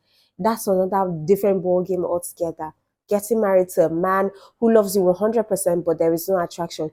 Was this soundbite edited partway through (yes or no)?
no